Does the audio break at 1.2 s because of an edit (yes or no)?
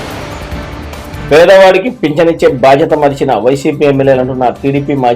yes